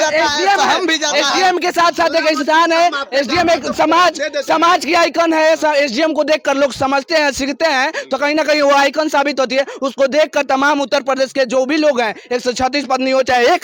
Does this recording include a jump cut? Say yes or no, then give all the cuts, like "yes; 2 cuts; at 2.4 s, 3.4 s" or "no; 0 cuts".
no; 0 cuts